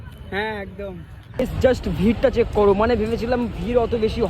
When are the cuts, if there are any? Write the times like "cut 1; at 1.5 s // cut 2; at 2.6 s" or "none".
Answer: cut 1; at 1.3 s